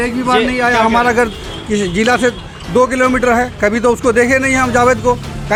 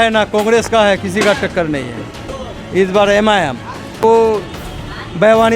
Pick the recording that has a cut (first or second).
second